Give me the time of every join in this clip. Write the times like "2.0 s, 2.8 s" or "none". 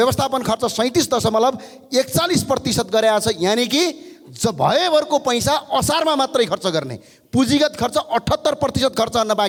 none

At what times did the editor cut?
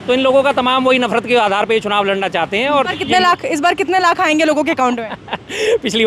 2.9 s

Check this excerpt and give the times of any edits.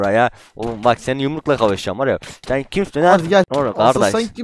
3.5 s

